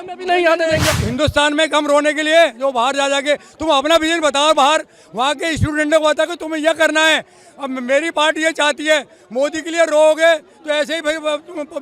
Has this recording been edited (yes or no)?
yes